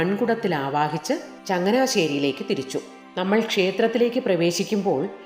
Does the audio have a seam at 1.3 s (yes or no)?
yes